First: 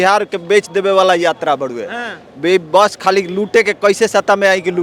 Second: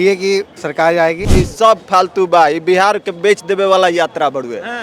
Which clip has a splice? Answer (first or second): second